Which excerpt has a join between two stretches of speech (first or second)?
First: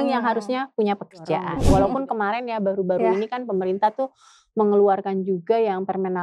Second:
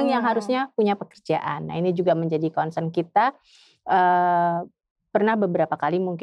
first